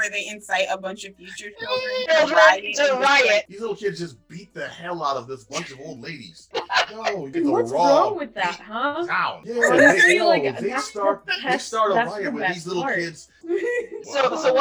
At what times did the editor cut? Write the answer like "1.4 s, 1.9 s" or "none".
3.5 s, 6.8 s, 9.4 s, 13.5 s